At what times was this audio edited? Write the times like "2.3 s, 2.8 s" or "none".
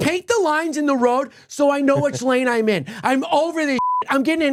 none